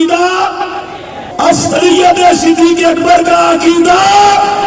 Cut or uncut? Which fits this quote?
uncut